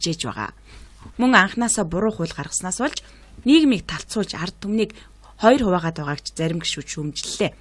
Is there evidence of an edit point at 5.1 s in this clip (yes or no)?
yes